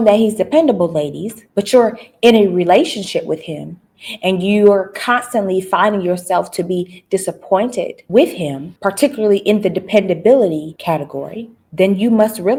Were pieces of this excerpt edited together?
no; 0 cuts

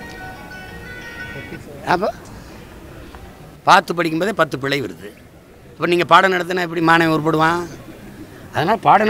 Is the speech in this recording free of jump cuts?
yes; 0 cuts

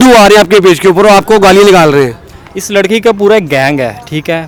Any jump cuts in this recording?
no; 0 cuts

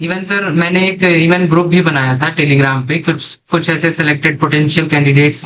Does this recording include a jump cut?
no; 0 cuts

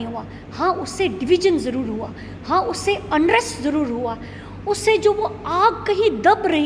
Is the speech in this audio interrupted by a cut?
no; 0 cuts

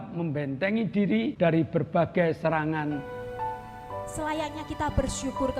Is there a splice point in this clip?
yes; 2 cuts; at 1.3 s, 3.1 s

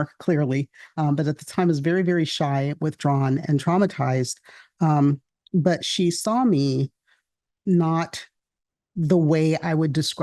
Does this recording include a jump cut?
no; 0 cuts

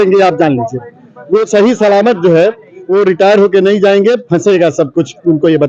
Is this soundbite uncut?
yes; 0 cuts

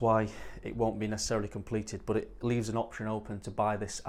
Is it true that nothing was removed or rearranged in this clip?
yes; 0 cuts

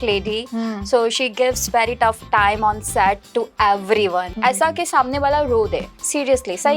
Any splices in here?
yes; 1 cut; at 4.3 s

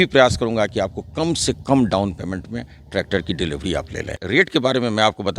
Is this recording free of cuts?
no; 1 cut; at 4.2 s

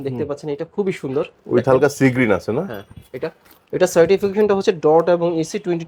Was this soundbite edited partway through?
no; 0 cuts

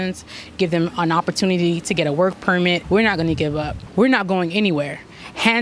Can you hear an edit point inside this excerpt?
yes; 1 cut; at 2.8 s

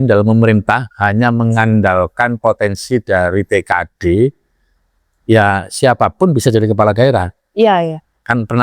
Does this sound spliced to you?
no; 0 cuts

